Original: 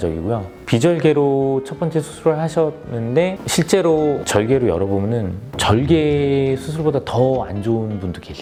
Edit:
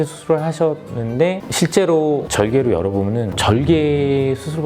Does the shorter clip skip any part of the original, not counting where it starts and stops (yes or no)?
yes